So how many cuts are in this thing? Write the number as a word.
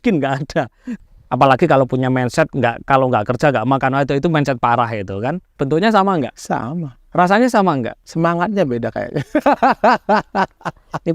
four